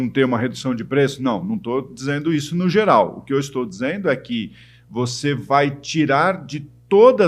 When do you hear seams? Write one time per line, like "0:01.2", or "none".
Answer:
none